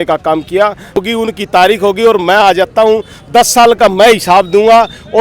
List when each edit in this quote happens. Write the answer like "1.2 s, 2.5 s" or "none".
1.0 s